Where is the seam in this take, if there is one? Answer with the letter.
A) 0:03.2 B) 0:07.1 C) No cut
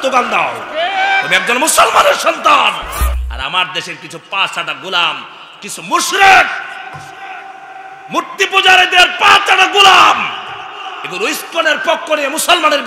A